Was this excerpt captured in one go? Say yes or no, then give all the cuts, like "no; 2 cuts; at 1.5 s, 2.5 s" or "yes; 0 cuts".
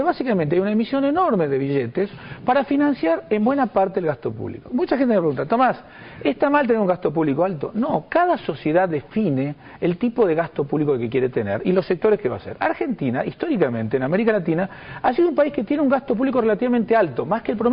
no; 1 cut; at 1.8 s